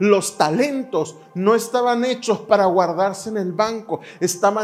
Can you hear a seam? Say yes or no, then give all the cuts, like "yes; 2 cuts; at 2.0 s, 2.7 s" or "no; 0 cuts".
no; 0 cuts